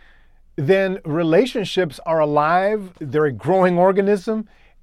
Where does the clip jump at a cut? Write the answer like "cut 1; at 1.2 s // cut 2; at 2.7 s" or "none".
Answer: cut 1; at 3.0 s